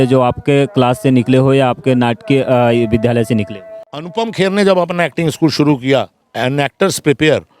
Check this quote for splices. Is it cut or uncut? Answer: cut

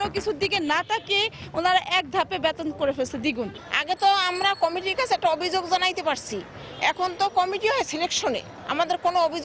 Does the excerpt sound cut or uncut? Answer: cut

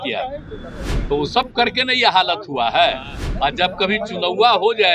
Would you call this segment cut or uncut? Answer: uncut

